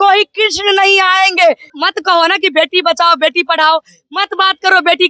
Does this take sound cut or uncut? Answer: cut